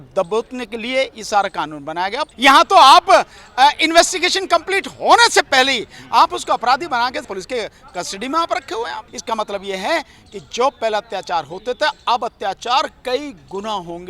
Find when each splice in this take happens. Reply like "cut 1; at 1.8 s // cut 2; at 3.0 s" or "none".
cut 1; at 2.3 s // cut 2; at 9.1 s